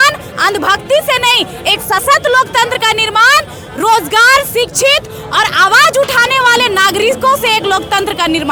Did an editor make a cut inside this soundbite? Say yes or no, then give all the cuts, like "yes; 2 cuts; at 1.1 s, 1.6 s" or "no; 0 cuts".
no; 0 cuts